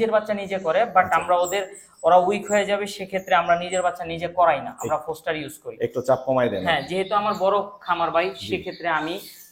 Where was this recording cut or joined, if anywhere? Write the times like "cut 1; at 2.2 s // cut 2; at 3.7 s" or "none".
none